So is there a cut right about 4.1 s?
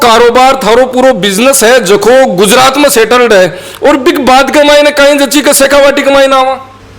no; 0 cuts

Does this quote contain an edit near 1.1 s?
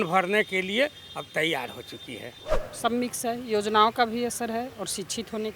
no; 1 cut; at 2.4 s

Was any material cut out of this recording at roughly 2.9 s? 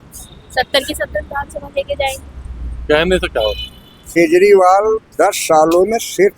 no; 1 cut; at 4.2 s

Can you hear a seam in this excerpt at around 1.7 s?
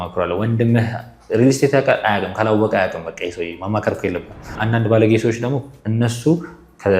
no; 1 cut; at 4.5 s

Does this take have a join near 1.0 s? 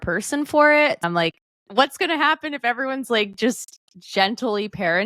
yes; 1 cut; at 1.0 s

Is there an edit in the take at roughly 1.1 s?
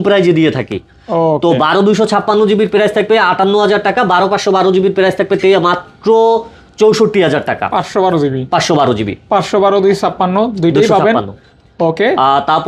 no; 0 cuts

